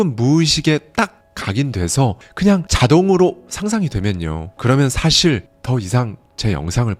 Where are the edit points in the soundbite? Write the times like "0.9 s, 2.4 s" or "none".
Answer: none